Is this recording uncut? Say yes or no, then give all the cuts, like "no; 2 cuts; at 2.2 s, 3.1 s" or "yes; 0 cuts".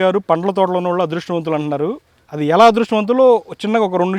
yes; 0 cuts